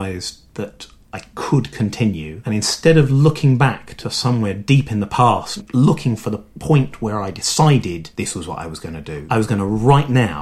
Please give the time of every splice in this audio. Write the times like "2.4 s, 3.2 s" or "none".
2.3 s, 5.6 s, 8.1 s, 9.2 s